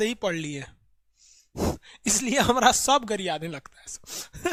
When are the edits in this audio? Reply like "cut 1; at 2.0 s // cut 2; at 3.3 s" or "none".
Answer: none

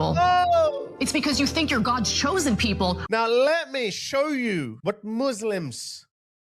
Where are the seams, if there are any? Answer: cut 1; at 3.0 s // cut 2; at 4.7 s

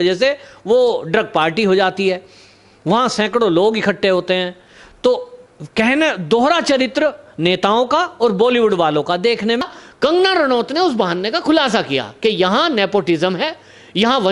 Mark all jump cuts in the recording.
cut 1; at 9.7 s

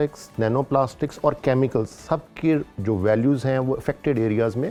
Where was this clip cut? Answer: none

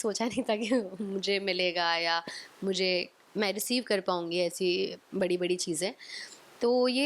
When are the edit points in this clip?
none

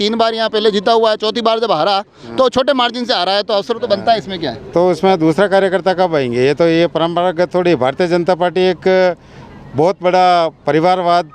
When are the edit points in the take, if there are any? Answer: none

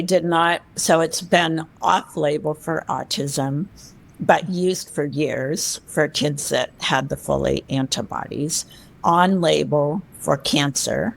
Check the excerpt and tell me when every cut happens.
cut 1; at 1.7 s

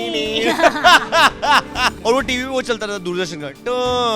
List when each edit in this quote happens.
cut 1; at 2.0 s

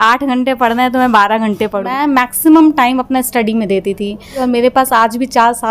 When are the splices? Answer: cut 1; at 1.9 s // cut 2; at 4.4 s

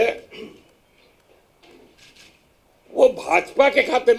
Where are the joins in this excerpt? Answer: none

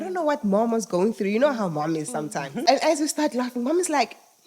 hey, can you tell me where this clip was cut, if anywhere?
cut 1; at 2.6 s

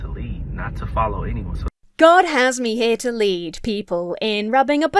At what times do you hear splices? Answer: none

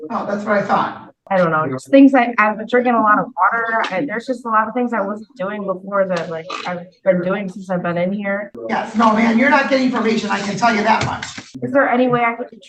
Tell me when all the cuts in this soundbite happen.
cut 1; at 1.2 s // cut 2; at 8.5 s // cut 3; at 11.5 s

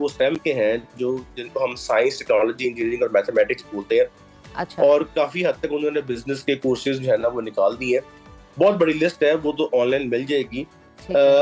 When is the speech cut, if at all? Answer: none

